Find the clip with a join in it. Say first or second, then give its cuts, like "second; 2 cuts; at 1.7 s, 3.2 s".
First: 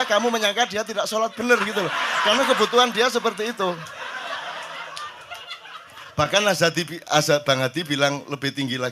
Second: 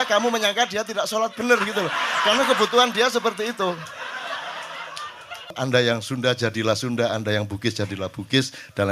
second; 1 cut; at 5.5 s